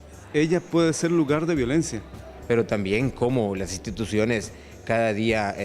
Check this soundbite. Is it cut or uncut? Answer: cut